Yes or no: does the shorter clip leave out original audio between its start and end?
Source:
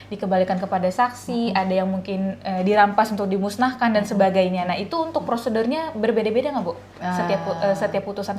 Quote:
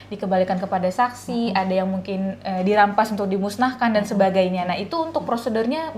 no